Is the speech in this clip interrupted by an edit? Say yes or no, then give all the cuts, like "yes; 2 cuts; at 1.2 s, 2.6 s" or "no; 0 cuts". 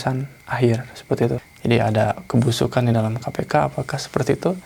yes; 1 cut; at 1.5 s